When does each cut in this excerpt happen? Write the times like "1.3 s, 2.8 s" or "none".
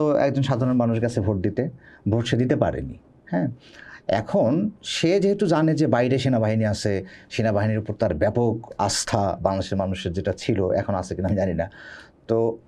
none